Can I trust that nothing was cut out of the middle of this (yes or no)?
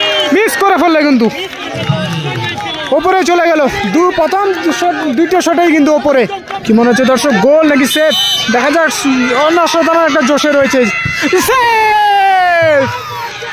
no